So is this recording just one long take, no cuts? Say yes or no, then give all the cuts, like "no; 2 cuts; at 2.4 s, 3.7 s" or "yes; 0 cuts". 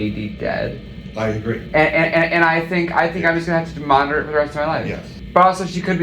no; 1 cut; at 5.1 s